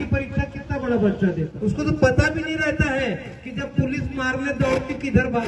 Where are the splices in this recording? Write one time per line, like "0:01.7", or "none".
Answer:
0:01.5